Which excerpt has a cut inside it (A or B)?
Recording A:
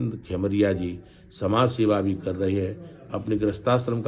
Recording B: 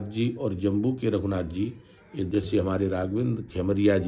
B